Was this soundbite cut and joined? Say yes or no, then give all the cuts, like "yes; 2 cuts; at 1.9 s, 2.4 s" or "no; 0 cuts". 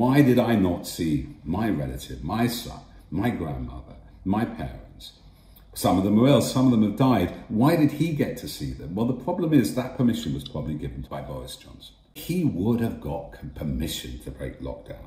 yes; 2 cuts; at 11.1 s, 12.2 s